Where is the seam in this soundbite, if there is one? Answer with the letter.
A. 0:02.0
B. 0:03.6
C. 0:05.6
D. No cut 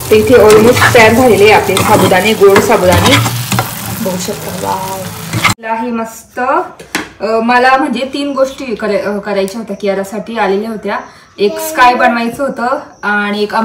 C